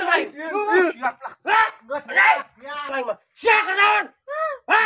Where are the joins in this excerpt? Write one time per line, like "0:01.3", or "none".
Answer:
0:02.9